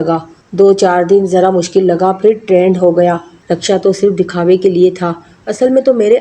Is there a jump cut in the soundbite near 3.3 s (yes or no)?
yes